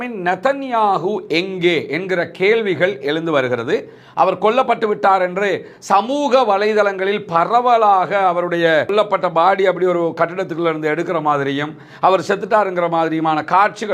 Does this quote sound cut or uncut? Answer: uncut